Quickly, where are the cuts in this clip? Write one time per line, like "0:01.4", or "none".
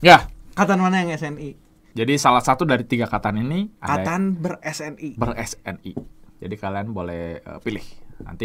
0:01.6